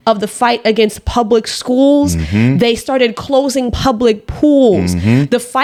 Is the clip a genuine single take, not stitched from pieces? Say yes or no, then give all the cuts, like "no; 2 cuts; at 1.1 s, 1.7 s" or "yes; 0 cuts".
yes; 0 cuts